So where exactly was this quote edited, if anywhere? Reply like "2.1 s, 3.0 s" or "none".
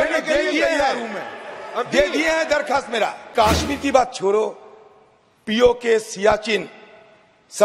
3.3 s